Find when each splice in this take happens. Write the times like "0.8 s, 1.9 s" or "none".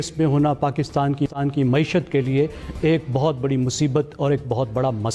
none